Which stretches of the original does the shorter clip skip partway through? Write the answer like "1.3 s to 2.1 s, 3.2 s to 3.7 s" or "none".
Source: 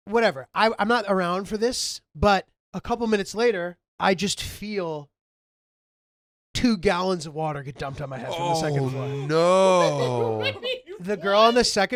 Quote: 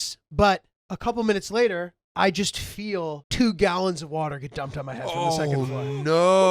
5.1 s to 6.5 s